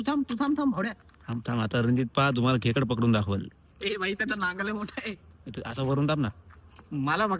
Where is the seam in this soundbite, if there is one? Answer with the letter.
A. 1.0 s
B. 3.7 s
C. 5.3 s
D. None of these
D